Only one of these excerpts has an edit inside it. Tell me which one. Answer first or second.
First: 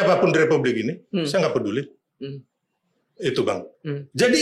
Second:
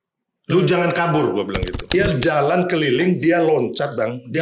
second